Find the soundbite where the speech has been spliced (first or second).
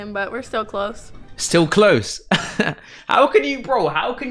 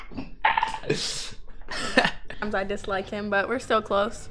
second